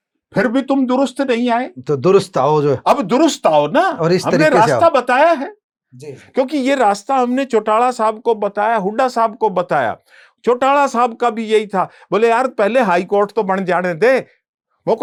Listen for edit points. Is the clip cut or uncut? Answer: uncut